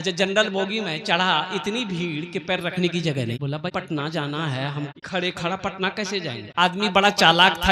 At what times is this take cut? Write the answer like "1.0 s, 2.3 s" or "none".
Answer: 3.7 s, 5.0 s, 6.4 s

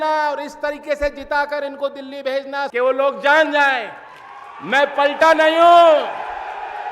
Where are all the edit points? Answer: 2.6 s

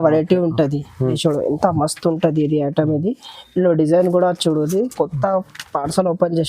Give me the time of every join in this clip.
1.1 s

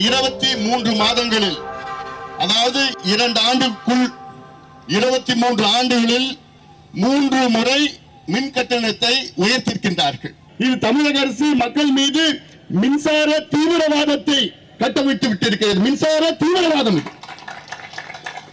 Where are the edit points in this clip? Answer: 10.4 s

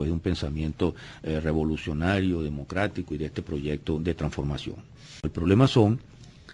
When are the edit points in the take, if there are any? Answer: 1.5 s

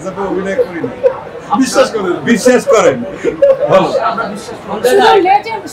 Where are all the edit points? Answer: none

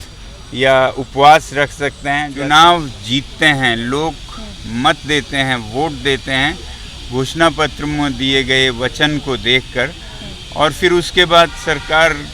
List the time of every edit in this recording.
2.3 s

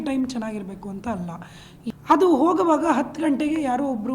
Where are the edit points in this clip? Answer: 1.7 s

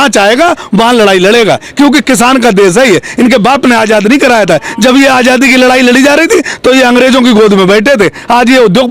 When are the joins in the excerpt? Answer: none

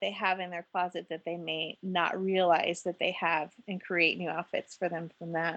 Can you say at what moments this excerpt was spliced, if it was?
none

